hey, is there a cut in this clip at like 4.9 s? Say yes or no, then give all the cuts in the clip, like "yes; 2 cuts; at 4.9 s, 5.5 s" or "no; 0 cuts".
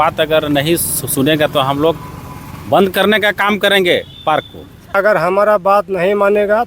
yes; 1 cut; at 4.9 s